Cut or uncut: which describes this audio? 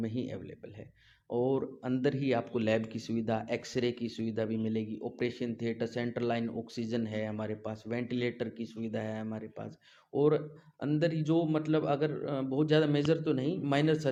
uncut